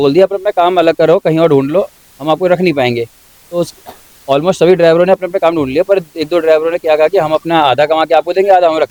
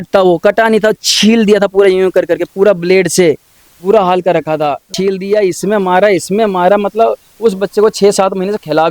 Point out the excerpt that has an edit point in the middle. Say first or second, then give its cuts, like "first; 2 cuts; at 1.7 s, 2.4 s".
second; 1 cut; at 4.9 s